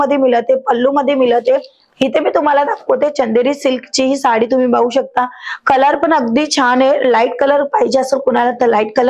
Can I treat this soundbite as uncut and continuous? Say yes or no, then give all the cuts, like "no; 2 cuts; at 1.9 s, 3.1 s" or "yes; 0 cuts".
no; 1 cut; at 1.8 s